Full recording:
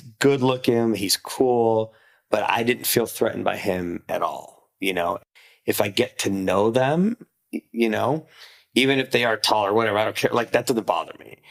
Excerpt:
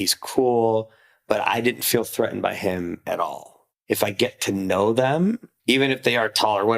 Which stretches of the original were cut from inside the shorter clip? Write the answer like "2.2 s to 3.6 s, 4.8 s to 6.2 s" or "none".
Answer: 4.6 s to 5.4 s, 7.3 s to 8.6 s